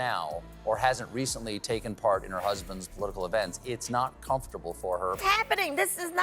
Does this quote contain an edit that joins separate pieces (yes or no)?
yes